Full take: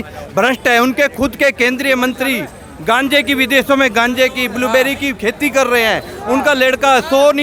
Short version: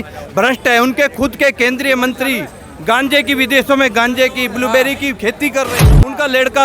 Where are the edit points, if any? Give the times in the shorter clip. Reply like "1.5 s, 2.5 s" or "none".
5.7 s